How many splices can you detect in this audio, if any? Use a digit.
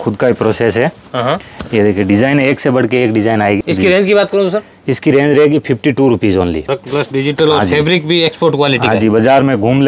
2